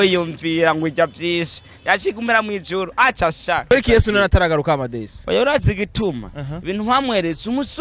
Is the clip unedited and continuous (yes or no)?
no